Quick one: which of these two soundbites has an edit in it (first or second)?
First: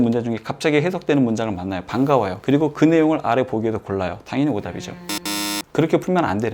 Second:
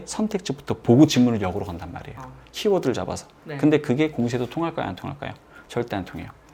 first